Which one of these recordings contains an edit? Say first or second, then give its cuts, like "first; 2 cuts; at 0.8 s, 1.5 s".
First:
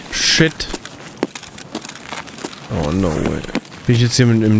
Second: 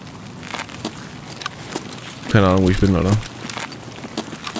first; 1 cut; at 3.7 s